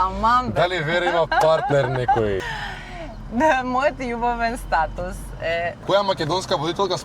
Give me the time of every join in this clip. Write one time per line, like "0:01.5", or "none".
0:02.5
0:05.8